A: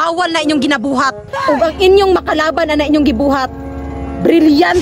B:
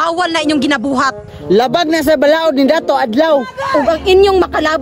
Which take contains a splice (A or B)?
A